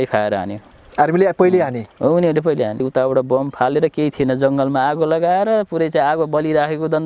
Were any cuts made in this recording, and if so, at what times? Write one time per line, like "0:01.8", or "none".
0:02.8